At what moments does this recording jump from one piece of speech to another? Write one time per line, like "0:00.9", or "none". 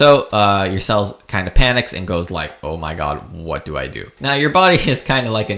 0:04.2